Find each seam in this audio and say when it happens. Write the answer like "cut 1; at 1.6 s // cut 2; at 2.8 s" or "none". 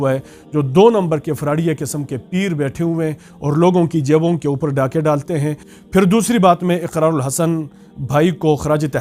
cut 1; at 5.7 s